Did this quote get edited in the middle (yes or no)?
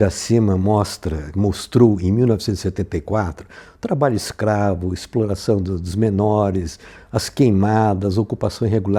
no